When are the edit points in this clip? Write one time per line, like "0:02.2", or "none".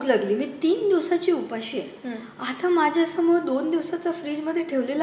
none